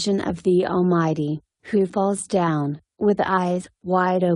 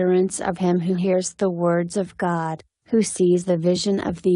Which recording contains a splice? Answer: second; 1 cut; at 2.7 s

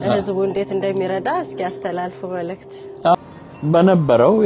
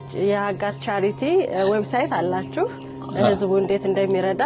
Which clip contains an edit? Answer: first; 1 cut; at 3.1 s

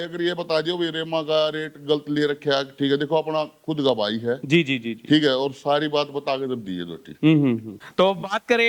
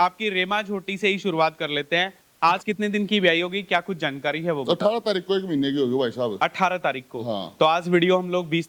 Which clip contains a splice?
first; 1 cut; at 7.8 s

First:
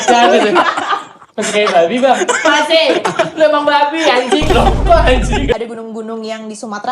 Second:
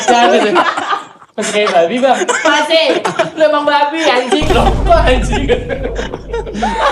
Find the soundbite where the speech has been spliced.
first; 1 cut; at 5.5 s

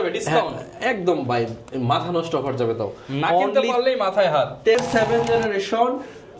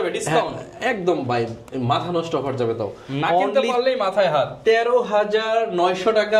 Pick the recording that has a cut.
first; 1 cut; at 4.8 s

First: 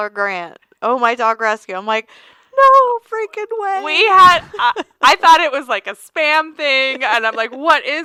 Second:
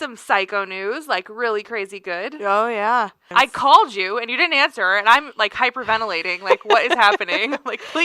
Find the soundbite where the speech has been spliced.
second; 1 cut; at 3.2 s

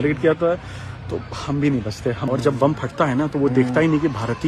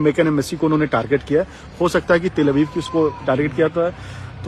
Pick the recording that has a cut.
first; 1 cut; at 2.3 s

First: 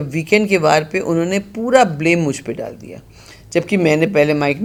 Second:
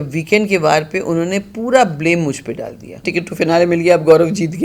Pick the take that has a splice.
second; 1 cut; at 3.0 s

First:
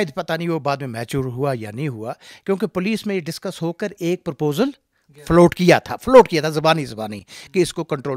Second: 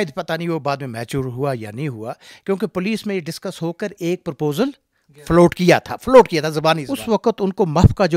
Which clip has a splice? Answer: second; 1 cut; at 6.9 s

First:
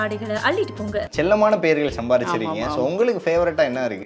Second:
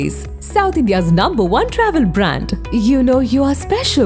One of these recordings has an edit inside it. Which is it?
first; 1 cut; at 1.0 s

